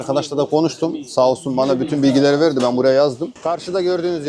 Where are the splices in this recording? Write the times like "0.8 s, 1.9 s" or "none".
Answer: 3.3 s

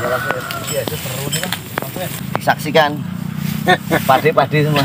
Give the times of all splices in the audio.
2.2 s

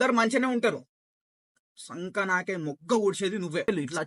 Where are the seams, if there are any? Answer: none

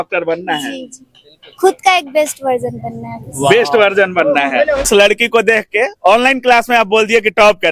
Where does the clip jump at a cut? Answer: 4.8 s

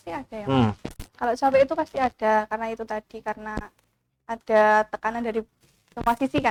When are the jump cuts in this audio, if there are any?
none

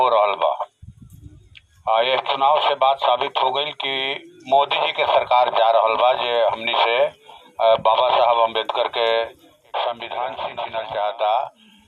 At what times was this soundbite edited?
10.6 s

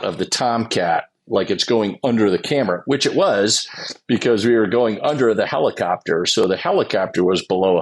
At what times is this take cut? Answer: none

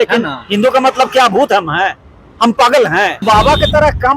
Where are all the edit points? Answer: 3.2 s

